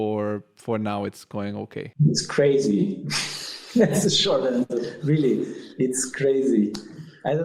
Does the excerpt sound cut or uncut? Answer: cut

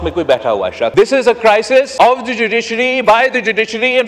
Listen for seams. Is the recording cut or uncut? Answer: cut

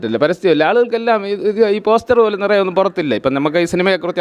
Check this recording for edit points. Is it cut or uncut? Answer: uncut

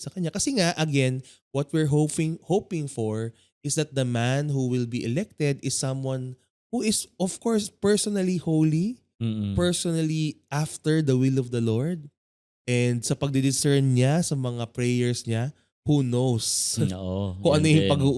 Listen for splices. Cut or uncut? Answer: uncut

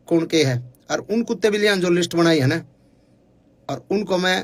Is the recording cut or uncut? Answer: uncut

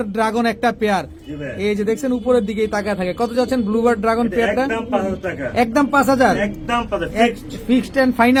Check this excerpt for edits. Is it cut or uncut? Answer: uncut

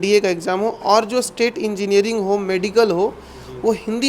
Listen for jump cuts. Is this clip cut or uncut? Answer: uncut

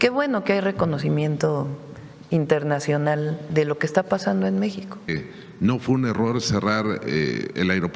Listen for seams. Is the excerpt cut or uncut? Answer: cut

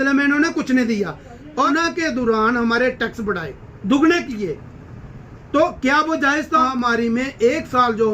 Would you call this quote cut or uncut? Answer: cut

